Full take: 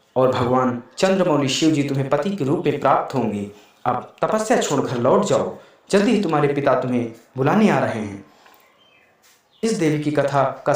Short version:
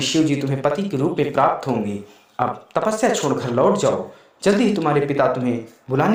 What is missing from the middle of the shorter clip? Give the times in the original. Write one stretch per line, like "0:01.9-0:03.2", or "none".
none

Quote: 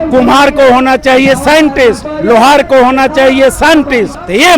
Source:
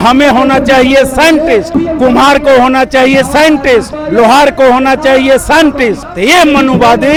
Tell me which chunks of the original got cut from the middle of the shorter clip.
none

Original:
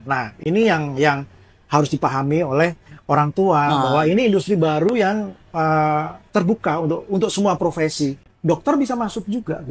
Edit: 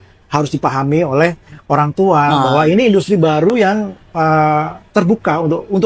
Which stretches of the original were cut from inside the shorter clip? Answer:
none

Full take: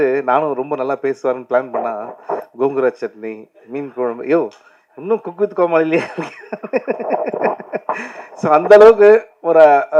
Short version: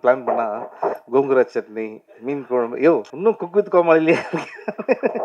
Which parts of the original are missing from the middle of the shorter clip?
0:04.6-0:04.9

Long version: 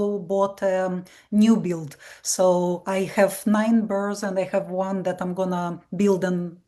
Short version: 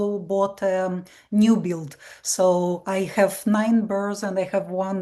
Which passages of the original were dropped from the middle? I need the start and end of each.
none

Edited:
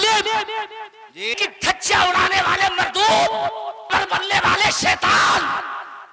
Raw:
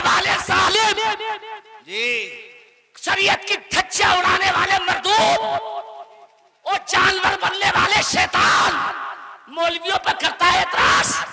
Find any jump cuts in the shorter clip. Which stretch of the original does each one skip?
0:02.1-0:03.4
0:06.0-0:07.2

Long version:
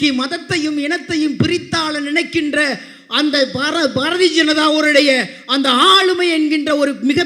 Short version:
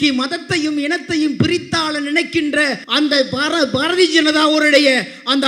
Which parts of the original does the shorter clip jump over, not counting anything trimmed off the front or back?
0:02.8-0:03.0

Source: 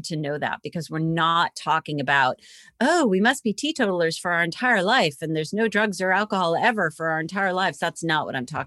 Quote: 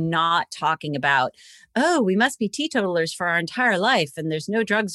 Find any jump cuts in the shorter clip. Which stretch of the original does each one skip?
none

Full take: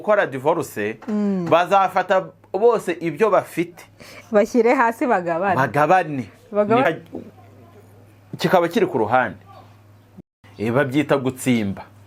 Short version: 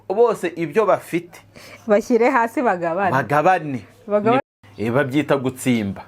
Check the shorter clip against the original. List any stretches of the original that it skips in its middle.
0:06.8-0:10.2

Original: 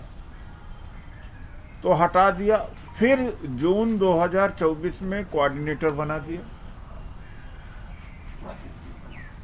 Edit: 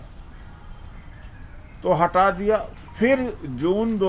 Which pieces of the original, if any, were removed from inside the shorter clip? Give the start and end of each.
none

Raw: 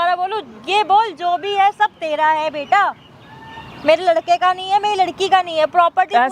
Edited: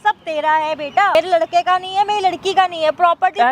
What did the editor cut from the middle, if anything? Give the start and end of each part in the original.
0:02.9-0:03.9

